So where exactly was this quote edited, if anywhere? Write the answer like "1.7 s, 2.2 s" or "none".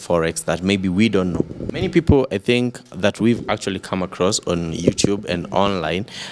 1.6 s